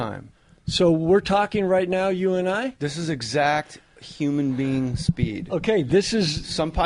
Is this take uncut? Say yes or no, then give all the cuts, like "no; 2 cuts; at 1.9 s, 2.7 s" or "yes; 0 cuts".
yes; 0 cuts